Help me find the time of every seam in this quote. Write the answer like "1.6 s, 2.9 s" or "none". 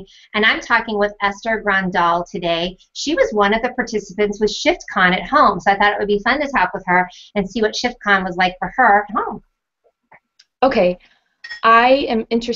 none